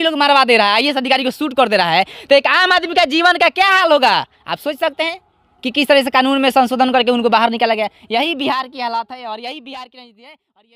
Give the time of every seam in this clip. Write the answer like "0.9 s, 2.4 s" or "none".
none